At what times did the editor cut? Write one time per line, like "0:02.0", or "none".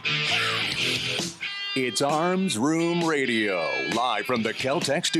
0:01.4